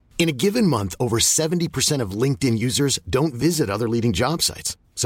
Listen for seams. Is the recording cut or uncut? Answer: uncut